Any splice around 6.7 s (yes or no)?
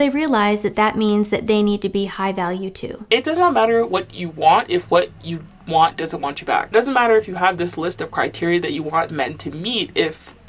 yes